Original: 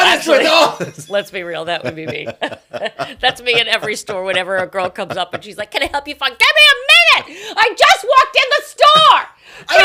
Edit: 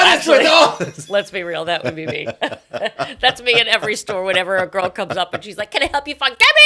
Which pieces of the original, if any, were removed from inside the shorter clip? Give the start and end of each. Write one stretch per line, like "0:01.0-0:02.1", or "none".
none